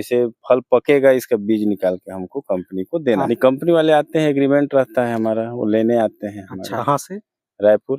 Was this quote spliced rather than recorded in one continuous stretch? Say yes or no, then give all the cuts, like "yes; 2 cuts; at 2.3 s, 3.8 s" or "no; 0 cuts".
yes; 2 cuts; at 3.3 s, 6.7 s